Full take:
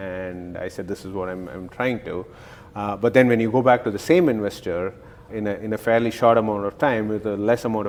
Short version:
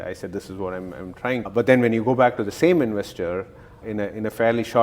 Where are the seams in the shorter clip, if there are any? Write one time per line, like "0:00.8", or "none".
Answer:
0:01.5